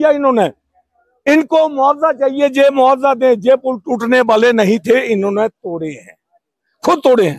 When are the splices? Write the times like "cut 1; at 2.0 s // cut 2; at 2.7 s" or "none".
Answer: none